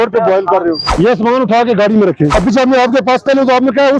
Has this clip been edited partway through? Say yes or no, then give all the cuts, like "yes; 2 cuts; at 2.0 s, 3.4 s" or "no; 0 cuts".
yes; 2 cuts; at 0.9 s, 2.3 s